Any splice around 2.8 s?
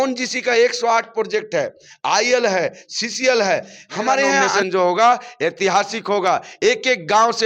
no; 1 cut; at 4.5 s

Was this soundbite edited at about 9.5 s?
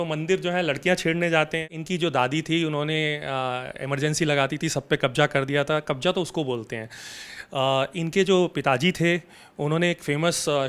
no; 1 cut; at 1.7 s

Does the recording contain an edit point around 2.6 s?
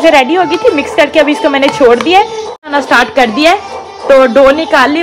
yes; 1 cut; at 2.6 s

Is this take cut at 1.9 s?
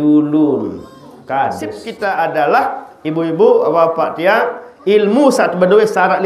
yes; 1 cut; at 1.9 s

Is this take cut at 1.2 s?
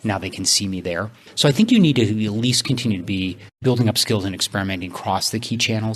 no; 1 cut; at 3.5 s

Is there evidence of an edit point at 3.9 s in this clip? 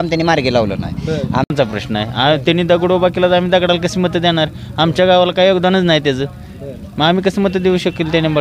no; 1 cut; at 1.5 s

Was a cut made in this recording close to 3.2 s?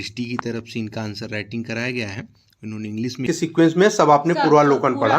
yes; 1 cut; at 3.2 s

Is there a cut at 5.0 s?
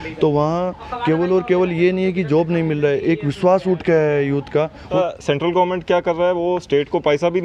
yes; 1 cut; at 5.0 s

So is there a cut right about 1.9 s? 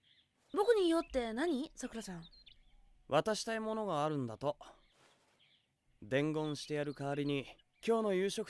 yes; 3 cuts; at 1.9 s, 4.7 s, 6.9 s

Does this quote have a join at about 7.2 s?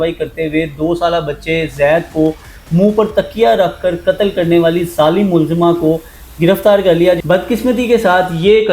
yes; 1 cut; at 7.2 s

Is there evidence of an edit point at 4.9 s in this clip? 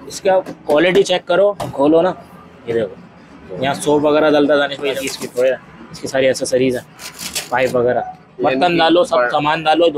yes; 3 cuts; at 1.6 s, 4.9 s, 8.3 s

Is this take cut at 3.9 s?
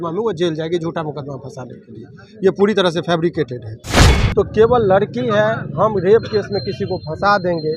yes; 1 cut; at 3.9 s

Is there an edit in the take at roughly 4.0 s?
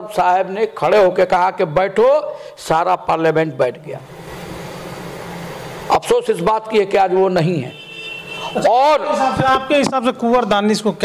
yes; 1 cut; at 4.0 s

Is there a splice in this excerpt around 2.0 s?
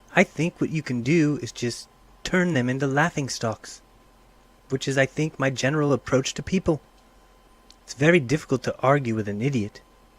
no; 1 cut; at 4.1 s

